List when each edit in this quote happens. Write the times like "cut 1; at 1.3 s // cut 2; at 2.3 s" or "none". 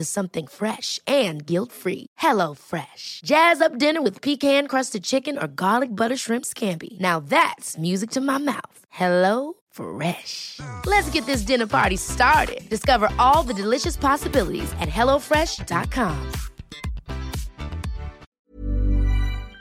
cut 1; at 18.3 s